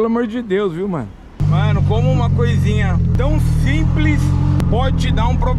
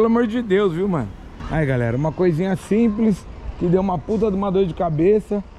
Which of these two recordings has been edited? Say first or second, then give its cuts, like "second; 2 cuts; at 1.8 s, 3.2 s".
first; 3 cuts; at 1.4 s, 3.1 s, 4.6 s